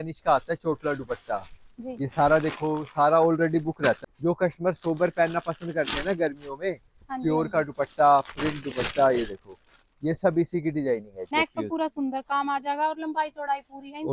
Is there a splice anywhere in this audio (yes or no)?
yes